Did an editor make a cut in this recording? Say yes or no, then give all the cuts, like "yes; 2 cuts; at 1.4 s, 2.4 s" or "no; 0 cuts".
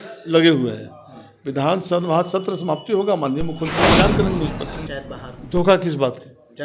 yes; 1 cut; at 4.9 s